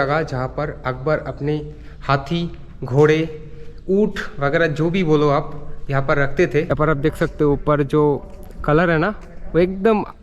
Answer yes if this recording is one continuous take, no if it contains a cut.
no